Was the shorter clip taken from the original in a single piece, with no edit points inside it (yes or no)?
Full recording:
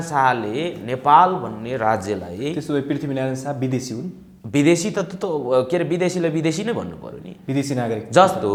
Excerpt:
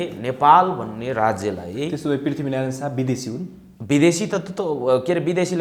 yes